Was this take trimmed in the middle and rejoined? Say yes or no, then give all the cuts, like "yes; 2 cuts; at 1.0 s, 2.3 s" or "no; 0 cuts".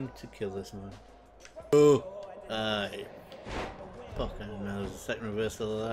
yes; 1 cut; at 1.7 s